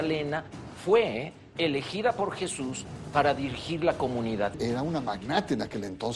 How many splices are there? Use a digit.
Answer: 1